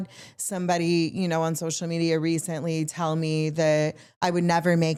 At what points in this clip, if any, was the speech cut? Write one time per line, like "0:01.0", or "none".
none